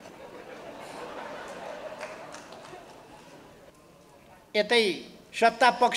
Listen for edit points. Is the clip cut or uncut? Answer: cut